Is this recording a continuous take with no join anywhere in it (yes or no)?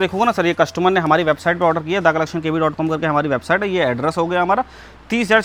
yes